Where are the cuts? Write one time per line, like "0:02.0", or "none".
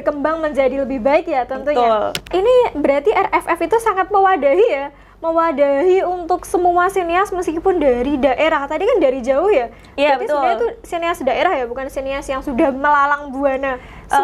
0:02.2